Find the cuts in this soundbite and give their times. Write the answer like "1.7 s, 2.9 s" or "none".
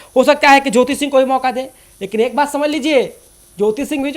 none